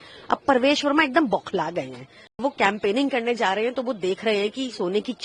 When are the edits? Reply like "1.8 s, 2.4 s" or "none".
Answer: 2.4 s